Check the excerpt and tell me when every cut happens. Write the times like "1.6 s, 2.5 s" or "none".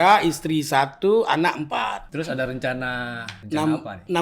2.0 s, 3.3 s

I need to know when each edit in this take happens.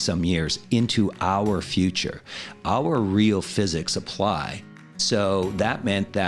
none

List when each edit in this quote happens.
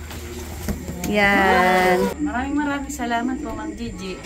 2.2 s

